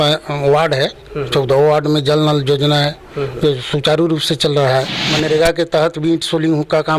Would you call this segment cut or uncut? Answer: cut